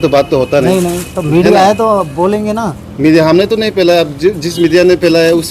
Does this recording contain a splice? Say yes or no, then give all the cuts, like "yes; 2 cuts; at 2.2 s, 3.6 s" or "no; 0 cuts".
no; 0 cuts